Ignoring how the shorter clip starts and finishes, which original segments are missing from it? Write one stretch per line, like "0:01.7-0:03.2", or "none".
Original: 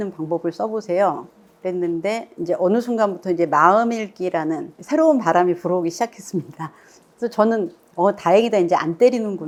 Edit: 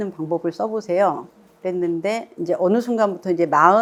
none

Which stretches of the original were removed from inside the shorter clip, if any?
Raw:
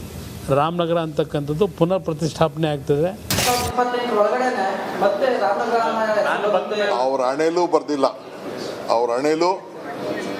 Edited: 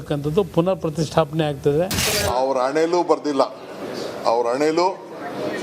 0:03.3-0:06.7

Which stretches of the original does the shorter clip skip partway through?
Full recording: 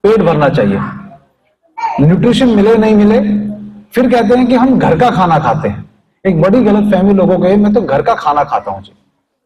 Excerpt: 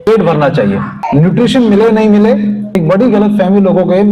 0:01.0-0:01.9
0:03.5-0:06.2

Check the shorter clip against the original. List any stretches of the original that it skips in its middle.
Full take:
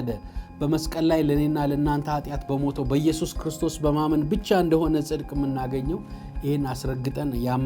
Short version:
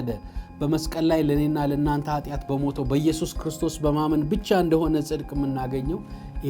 none

